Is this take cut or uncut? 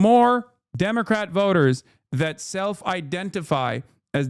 uncut